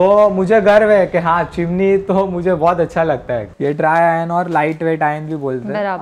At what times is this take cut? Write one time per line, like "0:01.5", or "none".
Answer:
0:03.5